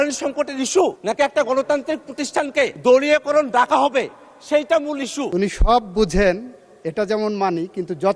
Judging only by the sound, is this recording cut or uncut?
cut